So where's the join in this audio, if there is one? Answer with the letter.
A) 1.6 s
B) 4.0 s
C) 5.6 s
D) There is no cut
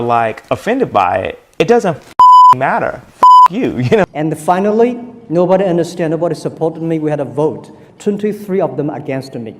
B